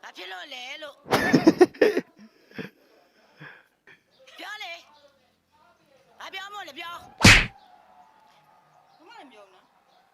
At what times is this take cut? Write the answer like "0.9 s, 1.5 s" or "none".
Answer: 4.0 s